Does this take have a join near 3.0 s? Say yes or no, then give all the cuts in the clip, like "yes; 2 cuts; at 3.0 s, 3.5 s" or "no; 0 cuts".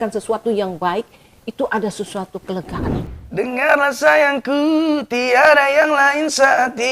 yes; 1 cut; at 3.0 s